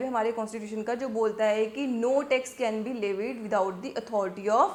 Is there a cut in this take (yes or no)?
no